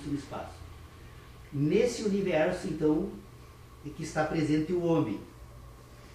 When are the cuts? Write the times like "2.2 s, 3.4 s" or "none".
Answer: 1.4 s